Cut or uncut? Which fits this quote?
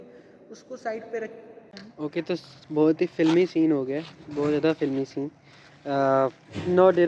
cut